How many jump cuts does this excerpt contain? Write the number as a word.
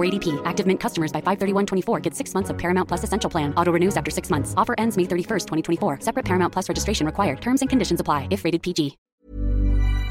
one